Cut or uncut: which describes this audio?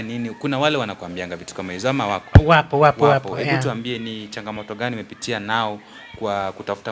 uncut